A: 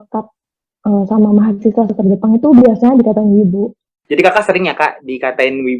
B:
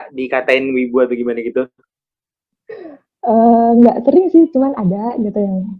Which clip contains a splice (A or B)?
A